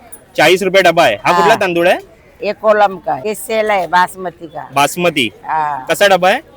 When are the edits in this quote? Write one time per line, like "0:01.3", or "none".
0:03.2